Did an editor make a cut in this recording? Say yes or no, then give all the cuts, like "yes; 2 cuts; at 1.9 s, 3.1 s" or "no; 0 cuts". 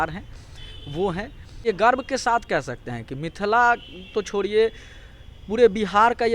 yes; 1 cut; at 1.6 s